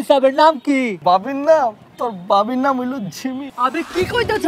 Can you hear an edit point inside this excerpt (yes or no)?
yes